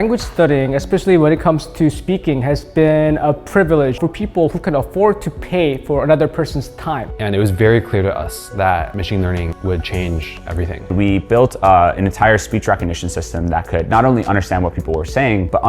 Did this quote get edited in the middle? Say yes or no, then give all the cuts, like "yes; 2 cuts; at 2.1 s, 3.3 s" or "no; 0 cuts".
yes; 2 cuts; at 7.1 s, 10.8 s